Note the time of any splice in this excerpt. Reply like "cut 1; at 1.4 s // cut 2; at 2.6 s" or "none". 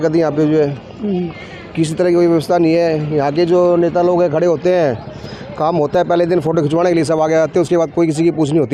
none